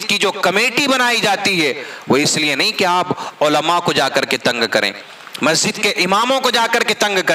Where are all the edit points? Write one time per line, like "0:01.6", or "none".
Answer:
none

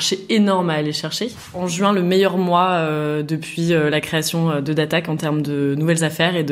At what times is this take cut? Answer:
0:01.6

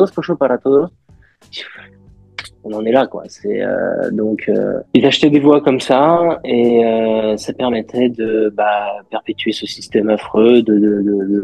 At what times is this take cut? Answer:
none

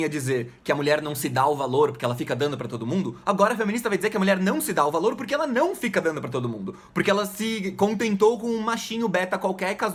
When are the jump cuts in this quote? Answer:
none

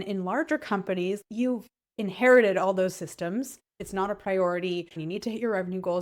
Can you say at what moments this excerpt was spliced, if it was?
0:01.2
0:03.8
0:05.0

